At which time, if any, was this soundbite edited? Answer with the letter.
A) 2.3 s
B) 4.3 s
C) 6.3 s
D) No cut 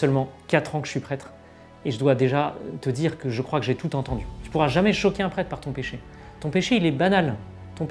B